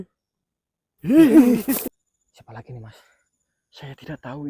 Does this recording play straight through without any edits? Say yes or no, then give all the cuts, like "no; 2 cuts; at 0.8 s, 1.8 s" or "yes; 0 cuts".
no; 1 cut; at 1.9 s